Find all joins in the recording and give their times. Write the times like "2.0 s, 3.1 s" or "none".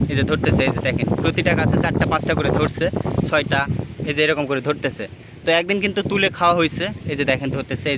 none